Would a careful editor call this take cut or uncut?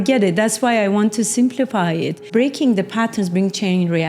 cut